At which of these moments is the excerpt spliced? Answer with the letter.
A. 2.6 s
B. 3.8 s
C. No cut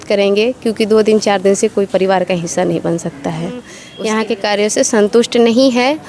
B